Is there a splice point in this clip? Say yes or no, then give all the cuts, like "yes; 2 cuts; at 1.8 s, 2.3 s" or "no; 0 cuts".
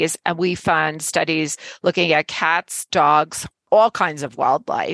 yes; 1 cut; at 3.7 s